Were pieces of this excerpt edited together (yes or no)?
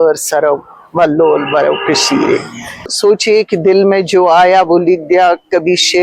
yes